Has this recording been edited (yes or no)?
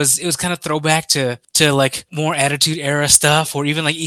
yes